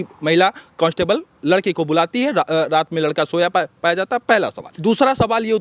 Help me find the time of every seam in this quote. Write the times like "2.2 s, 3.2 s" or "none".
4.6 s